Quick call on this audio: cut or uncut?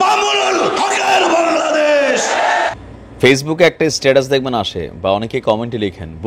cut